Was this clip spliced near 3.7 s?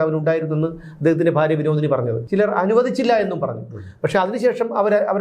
no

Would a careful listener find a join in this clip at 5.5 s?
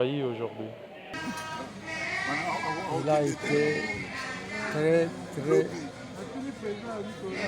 no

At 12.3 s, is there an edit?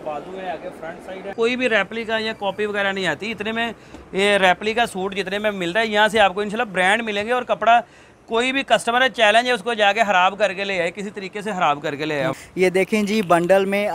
yes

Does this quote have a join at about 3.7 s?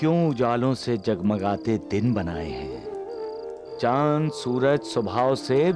no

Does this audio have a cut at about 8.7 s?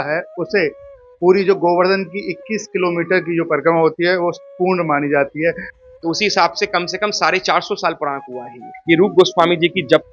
yes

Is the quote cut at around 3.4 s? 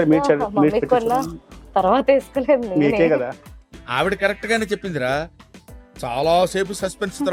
no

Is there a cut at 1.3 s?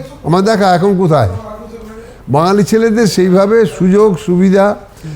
no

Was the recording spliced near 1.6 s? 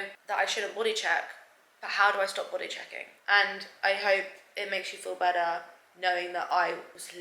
no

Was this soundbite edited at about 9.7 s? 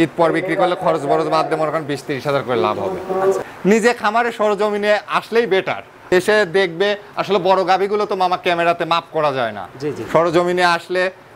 no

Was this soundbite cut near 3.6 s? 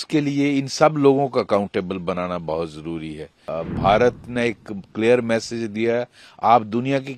yes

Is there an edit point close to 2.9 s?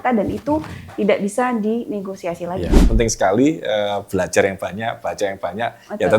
yes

